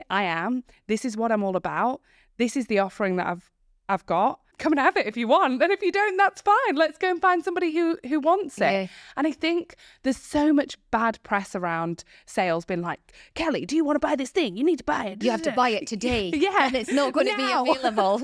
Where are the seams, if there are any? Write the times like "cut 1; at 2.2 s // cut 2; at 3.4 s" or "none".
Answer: none